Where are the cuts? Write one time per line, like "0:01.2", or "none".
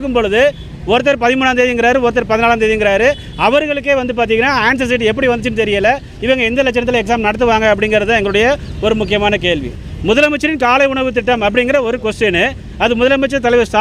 0:09.8